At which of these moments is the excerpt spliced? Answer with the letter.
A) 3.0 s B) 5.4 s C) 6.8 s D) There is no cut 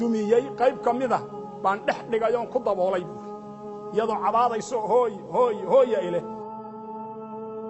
C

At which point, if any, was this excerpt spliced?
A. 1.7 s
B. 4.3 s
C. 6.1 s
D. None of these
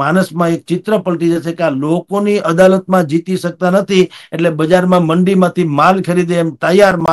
D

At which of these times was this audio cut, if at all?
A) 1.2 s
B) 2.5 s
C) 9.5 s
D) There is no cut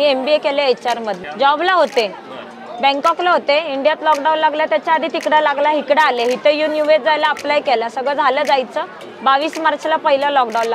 A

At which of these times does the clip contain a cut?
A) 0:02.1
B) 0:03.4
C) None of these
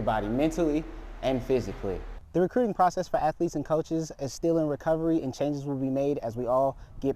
A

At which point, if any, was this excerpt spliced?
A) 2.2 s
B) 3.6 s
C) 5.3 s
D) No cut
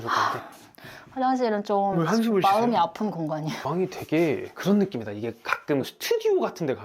B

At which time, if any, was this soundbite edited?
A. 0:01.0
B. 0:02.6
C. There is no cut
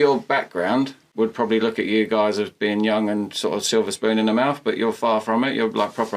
A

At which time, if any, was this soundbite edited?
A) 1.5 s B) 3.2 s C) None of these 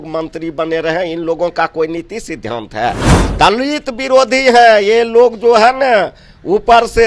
B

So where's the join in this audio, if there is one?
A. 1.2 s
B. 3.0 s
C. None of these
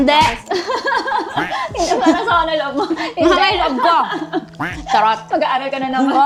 C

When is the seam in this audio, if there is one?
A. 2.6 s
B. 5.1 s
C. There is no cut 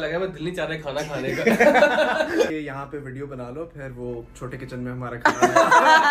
A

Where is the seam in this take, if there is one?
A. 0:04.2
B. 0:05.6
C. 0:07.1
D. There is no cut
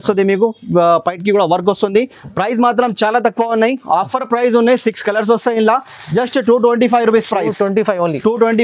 D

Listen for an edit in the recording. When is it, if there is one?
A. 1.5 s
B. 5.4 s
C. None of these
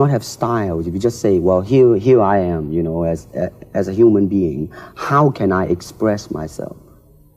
B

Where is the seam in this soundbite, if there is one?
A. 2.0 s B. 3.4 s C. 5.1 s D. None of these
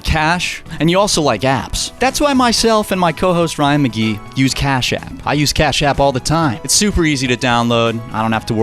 C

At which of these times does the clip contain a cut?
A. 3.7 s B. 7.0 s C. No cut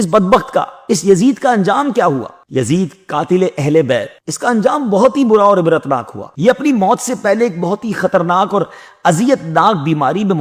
C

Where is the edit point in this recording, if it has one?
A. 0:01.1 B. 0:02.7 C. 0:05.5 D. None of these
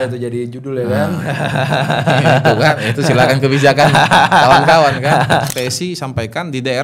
C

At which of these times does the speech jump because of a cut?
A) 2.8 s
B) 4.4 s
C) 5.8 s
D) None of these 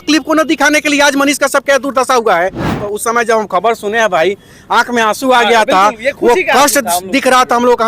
A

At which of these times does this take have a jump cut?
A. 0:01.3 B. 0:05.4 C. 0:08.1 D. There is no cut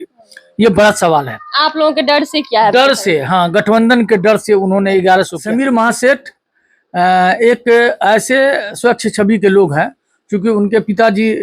B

